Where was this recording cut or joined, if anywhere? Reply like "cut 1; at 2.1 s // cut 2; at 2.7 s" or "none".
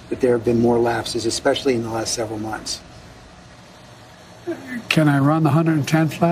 none